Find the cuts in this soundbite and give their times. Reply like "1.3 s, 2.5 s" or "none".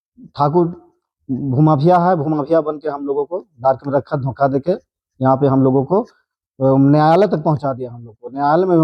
none